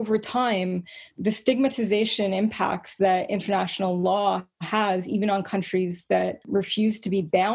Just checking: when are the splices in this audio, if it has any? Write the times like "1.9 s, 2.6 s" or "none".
6.4 s